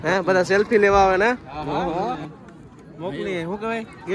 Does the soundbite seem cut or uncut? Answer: cut